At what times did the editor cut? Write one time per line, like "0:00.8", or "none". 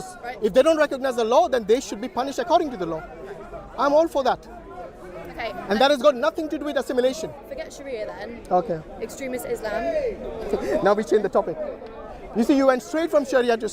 0:07.4